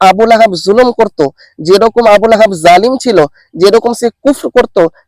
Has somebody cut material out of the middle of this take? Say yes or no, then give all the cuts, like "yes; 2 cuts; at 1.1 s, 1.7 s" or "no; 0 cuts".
no; 0 cuts